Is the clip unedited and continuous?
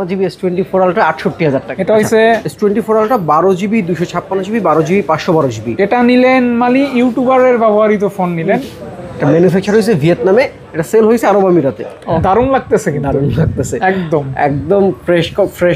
no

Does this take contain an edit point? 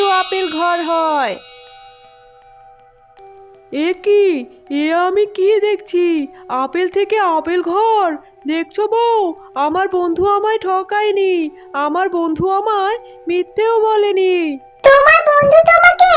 no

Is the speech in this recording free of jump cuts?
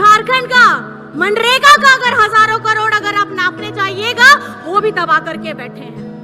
no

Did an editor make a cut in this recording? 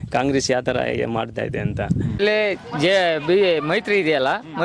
yes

